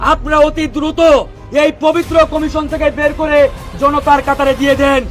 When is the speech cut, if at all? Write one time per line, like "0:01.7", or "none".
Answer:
none